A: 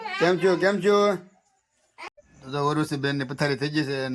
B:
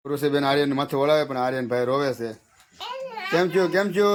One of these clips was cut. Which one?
A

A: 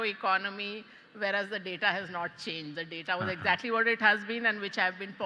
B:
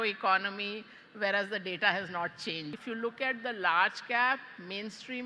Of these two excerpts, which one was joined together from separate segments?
B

